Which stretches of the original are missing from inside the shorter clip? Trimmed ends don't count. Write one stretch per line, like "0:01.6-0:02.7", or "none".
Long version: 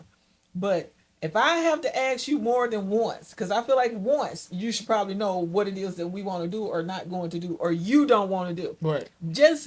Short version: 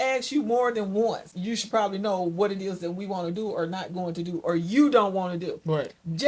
0:03.3-0:04.5